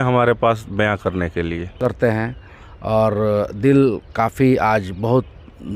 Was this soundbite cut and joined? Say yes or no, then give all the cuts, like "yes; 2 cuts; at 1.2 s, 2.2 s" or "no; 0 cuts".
yes; 1 cut; at 1.7 s